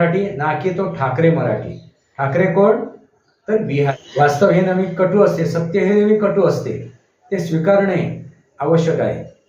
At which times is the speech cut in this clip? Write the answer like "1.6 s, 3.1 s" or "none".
3.9 s